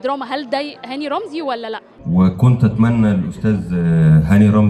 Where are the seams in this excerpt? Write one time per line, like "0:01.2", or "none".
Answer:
0:02.0